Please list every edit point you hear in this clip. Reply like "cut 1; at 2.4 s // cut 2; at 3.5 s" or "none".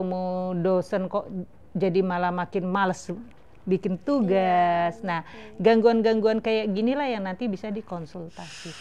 none